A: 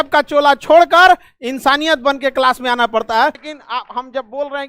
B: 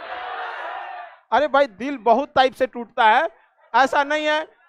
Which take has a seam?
A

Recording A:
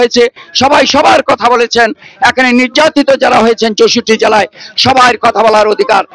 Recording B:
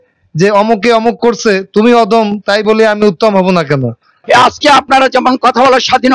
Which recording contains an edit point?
B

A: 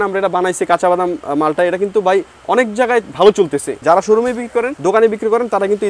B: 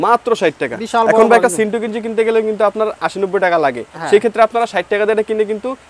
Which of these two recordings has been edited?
A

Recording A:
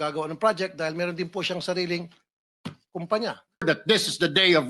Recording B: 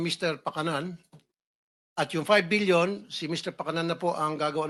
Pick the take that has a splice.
A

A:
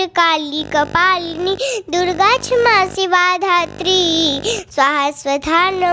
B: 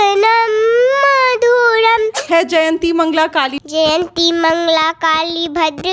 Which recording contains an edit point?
B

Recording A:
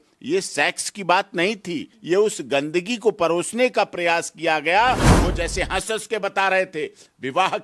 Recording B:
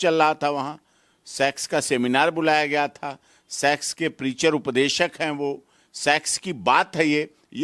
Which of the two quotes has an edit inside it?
A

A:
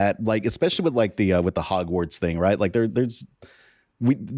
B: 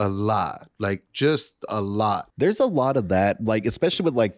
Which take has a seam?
B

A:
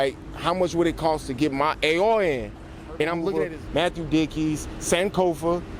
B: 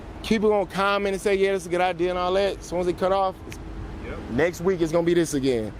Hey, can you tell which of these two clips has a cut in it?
A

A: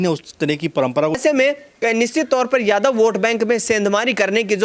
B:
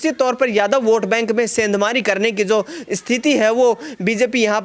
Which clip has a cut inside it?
A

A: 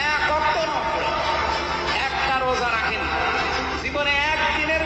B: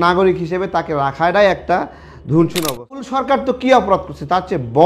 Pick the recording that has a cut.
B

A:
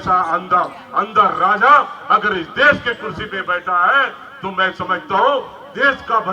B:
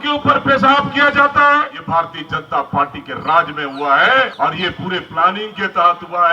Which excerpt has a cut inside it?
B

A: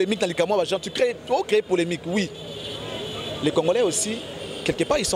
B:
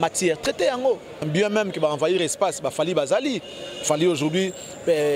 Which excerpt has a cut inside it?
B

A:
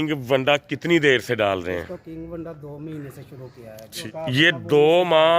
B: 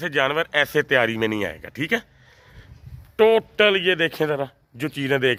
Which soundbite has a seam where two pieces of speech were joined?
A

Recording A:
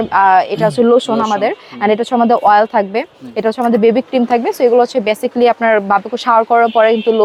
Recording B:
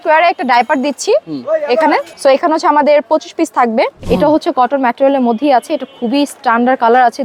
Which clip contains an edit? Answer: B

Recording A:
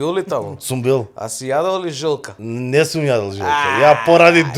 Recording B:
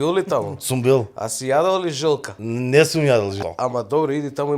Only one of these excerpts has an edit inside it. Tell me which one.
B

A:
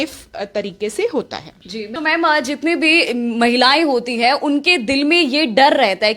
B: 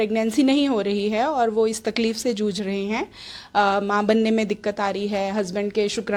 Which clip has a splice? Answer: A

